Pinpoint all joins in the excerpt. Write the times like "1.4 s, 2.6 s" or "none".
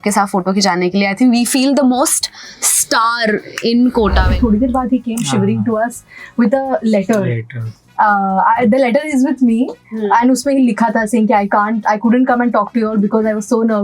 4.2 s